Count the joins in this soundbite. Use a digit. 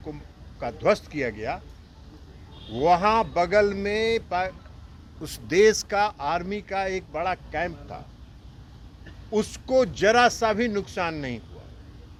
0